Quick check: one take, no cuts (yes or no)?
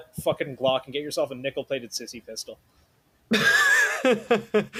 yes